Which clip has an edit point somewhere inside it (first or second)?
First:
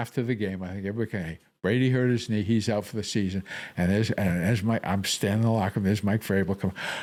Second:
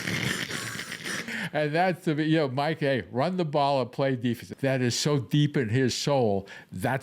second